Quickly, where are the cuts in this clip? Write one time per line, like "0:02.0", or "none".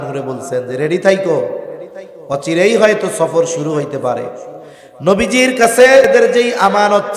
0:06.1